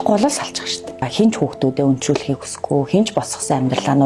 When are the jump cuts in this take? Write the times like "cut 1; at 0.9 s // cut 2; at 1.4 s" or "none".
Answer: cut 1; at 1.1 s